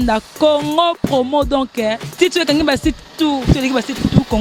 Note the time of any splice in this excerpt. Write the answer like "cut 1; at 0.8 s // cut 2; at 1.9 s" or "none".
none

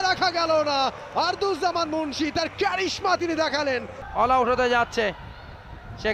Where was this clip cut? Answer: cut 1; at 4.0 s

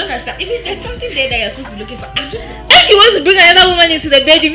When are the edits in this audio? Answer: cut 1; at 2.6 s

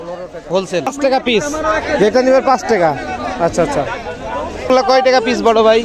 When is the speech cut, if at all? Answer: cut 1; at 0.9 s // cut 2; at 4.7 s

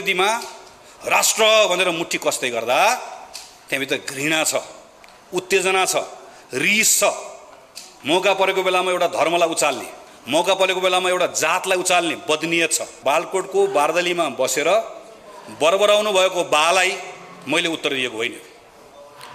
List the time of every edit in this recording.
cut 1; at 12.9 s

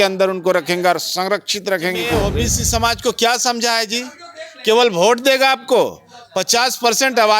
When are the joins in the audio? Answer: cut 1; at 2.2 s

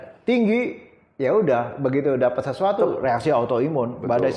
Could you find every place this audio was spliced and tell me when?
none

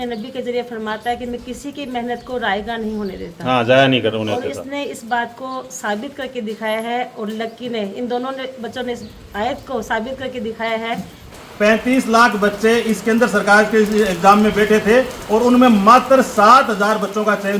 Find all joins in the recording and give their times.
cut 1; at 11.3 s

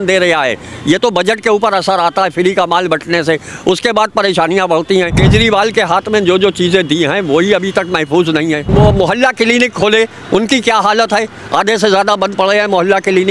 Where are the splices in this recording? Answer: cut 1; at 5.2 s // cut 2; at 8.7 s

